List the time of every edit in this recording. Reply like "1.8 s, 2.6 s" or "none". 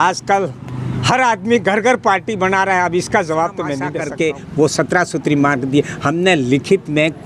3.9 s

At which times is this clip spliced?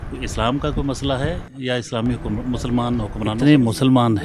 3.2 s

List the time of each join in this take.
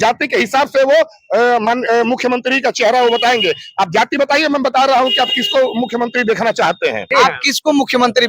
7.1 s

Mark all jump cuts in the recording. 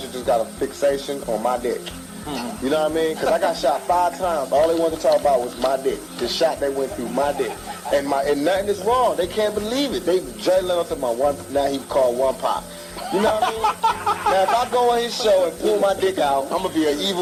none

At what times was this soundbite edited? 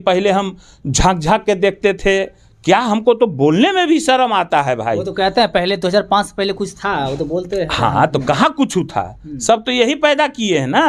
none

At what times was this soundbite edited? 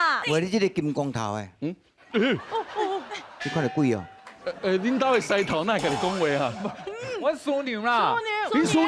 none

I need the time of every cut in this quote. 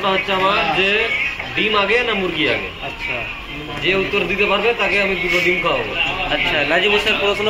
none

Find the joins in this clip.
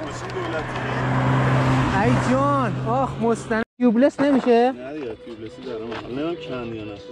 3.6 s

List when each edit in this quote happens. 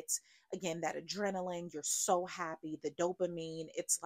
none

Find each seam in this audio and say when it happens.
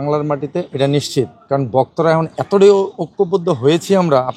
none

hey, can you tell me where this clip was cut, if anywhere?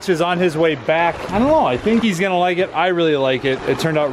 1.2 s

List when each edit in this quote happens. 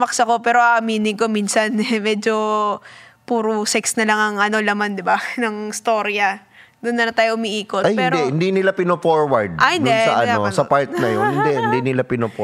none

